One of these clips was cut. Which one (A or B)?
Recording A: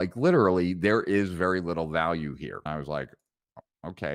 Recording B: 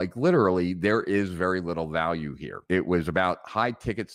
A